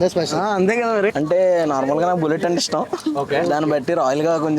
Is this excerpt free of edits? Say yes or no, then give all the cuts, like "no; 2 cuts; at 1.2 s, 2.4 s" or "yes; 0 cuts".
no; 1 cut; at 1.1 s